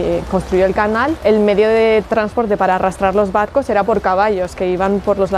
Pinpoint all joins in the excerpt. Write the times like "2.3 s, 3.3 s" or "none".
1.2 s, 2.1 s